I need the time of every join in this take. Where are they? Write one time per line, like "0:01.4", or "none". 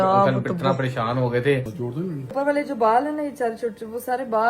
0:02.3

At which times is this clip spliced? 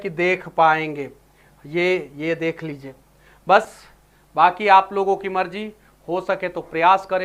none

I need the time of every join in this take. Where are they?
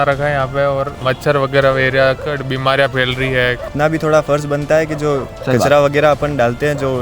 0:01.0
0:03.7

